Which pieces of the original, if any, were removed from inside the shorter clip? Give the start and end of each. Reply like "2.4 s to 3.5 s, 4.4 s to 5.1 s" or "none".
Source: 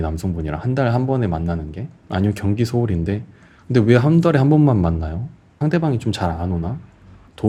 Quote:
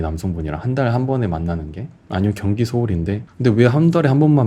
3.3 s to 3.6 s

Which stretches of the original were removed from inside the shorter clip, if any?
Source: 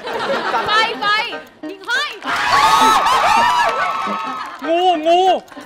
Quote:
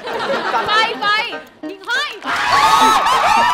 none

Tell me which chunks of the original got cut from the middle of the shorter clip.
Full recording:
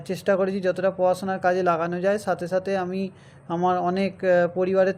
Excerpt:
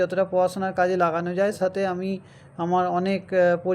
2.2 s to 2.5 s

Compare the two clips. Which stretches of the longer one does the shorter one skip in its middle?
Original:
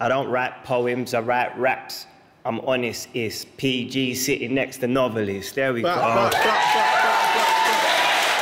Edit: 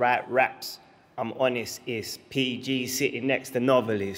none

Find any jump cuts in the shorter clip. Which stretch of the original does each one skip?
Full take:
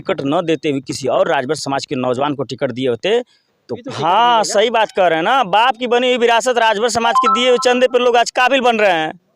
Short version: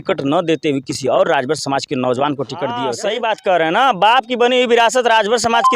2.9 s to 4.5 s

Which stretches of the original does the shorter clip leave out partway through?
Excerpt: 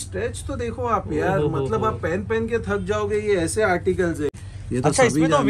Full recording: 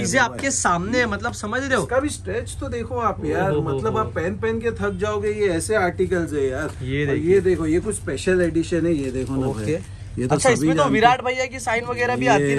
6.4 s to 9.8 s

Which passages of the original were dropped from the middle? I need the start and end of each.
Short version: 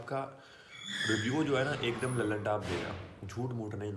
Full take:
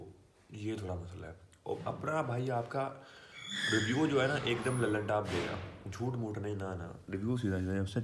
none

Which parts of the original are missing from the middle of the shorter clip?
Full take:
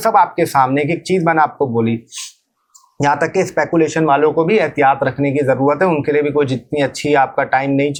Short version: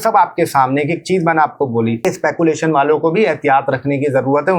2.0 s to 3.3 s

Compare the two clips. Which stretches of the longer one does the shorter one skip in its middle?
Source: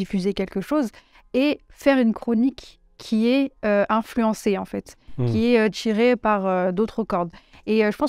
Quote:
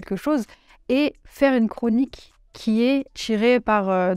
3.6 s to 5.7 s

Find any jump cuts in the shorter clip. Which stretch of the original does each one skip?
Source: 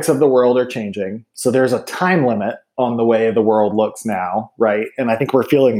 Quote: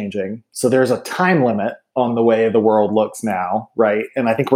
none

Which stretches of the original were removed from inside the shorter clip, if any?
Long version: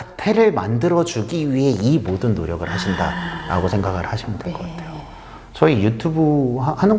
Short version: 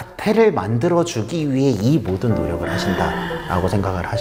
none

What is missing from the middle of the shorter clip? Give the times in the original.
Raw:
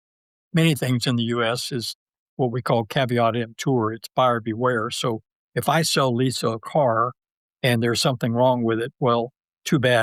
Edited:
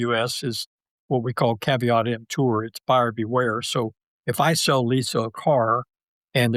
none

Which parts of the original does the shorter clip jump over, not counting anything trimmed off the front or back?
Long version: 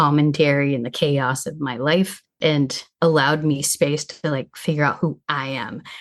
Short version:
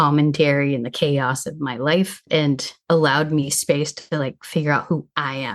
2.5 s to 2.6 s

